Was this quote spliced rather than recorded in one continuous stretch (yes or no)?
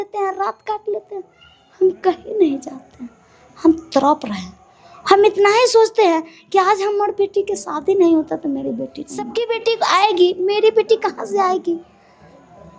yes